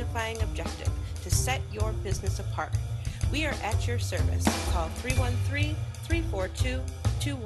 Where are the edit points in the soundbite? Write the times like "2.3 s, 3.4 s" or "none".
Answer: none